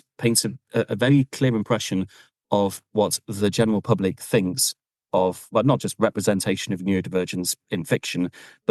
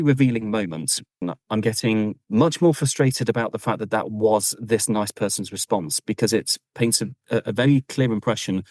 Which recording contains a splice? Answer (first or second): second